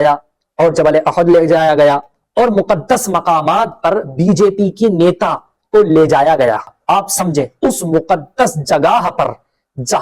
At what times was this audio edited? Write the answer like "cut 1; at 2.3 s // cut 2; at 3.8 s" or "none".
cut 1; at 6.8 s